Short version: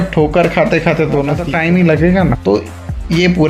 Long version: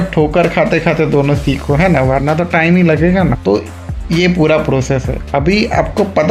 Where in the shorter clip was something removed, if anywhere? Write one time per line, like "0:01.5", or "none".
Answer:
0:01.4